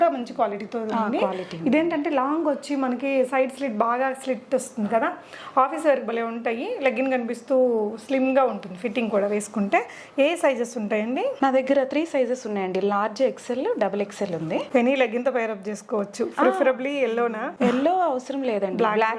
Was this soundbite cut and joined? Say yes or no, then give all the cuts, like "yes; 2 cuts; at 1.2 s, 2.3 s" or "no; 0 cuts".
no; 0 cuts